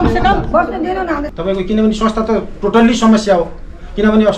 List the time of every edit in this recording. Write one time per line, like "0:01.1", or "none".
0:01.3